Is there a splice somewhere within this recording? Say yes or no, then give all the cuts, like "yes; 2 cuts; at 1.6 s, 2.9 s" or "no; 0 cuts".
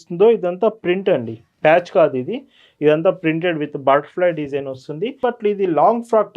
yes; 1 cut; at 5.2 s